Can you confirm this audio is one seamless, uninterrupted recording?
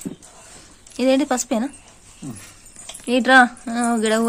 yes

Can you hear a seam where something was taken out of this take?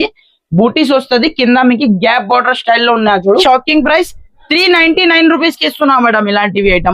yes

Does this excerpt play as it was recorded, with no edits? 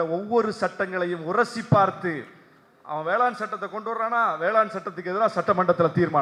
yes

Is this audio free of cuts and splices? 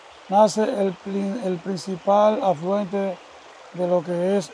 yes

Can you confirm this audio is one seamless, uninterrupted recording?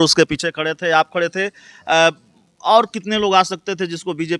yes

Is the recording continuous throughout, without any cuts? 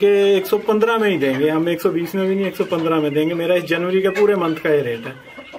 yes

